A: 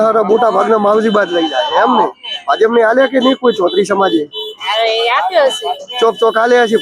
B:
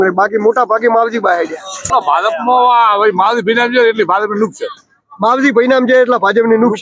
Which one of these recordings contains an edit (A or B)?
B